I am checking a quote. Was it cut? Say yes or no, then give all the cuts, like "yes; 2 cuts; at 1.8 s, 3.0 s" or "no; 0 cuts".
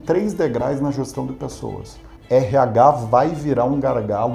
yes; 1 cut; at 2.1 s